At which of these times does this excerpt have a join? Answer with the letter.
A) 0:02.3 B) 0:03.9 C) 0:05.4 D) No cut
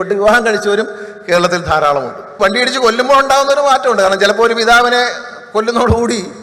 A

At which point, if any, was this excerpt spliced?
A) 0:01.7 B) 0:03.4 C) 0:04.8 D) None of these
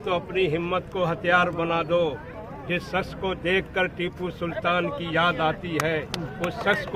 D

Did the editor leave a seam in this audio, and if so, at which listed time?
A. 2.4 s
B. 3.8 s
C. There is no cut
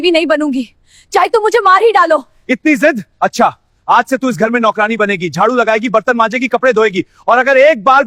C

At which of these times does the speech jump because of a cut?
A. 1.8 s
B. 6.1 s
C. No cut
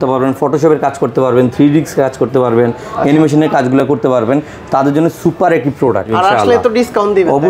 B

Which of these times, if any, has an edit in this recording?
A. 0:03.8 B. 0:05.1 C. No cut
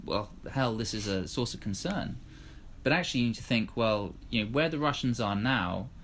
C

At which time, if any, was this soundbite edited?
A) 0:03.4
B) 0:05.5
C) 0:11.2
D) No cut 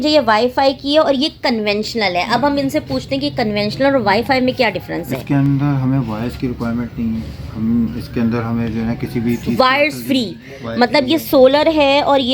D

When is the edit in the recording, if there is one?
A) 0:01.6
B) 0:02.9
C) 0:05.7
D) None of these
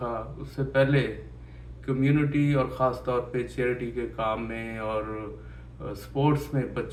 D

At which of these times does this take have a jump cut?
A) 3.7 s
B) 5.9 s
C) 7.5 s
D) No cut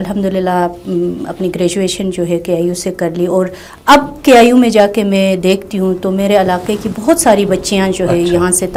D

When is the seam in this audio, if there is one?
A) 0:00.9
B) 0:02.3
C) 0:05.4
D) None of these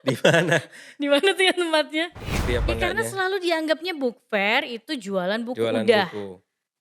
B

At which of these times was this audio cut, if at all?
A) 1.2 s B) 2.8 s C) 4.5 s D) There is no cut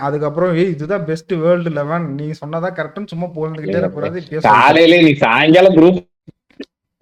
D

